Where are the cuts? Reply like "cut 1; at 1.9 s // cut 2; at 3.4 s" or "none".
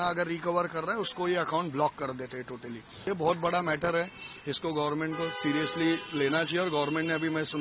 cut 1; at 3.1 s